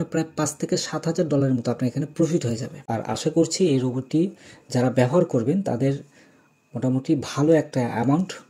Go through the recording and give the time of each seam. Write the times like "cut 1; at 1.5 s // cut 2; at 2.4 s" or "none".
cut 1; at 2.8 s